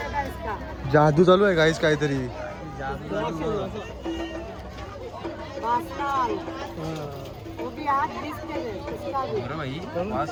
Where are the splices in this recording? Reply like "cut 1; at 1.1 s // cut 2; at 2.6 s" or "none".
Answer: none